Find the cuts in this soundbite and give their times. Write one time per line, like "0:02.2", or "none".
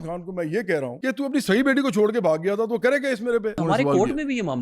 0:01.0
0:03.6